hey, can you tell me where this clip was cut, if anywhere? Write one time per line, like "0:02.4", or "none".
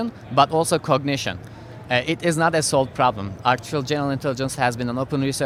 none